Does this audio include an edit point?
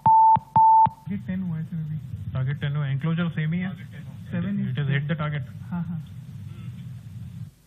yes; 1 cut; at 0.9 s

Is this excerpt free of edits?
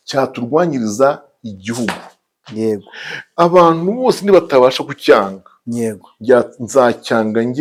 yes; 0 cuts

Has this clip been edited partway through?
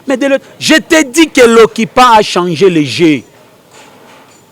no; 0 cuts

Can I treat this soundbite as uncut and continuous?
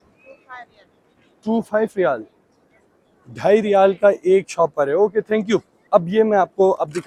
yes; 0 cuts

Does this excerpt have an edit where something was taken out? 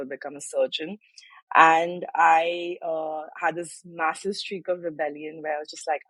no; 0 cuts

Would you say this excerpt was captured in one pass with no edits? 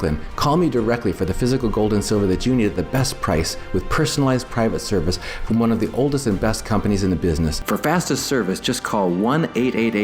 no; 1 cut; at 7.6 s

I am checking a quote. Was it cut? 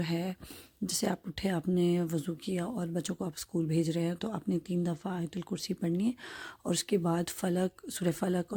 no; 0 cuts

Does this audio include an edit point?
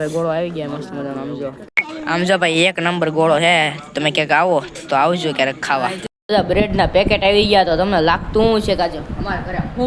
yes; 2 cuts; at 1.6 s, 6.1 s

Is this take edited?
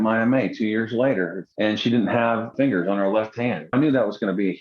yes; 3 cuts; at 1.4 s, 2.5 s, 3.7 s

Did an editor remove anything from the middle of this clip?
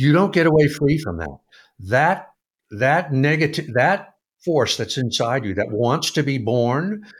no; 0 cuts

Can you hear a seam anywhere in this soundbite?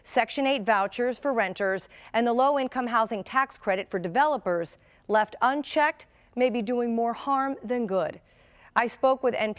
yes; 1 cut; at 2.4 s

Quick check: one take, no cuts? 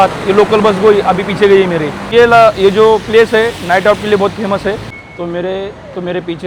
no; 2 cuts; at 2.0 s, 4.8 s

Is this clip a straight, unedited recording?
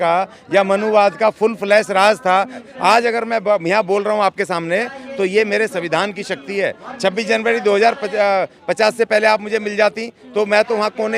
no; 1 cut; at 2.6 s

